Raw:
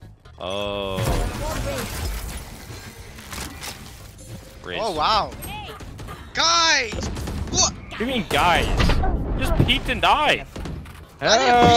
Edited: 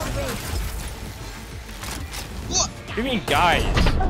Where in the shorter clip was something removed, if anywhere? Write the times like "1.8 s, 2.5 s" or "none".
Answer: 2.3 s